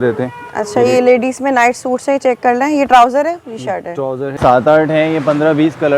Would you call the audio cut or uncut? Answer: cut